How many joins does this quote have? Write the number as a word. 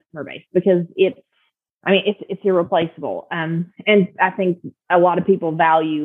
zero